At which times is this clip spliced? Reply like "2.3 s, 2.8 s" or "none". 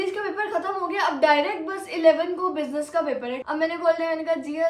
3.4 s